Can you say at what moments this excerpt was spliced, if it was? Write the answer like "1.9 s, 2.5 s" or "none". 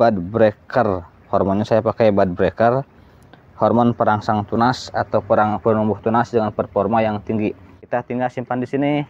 7.8 s